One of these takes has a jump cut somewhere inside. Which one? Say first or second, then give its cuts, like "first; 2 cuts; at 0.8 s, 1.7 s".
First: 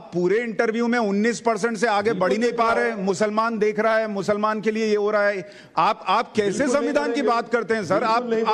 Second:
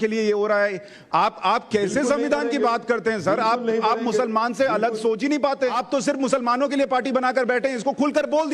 second; 1 cut; at 5.8 s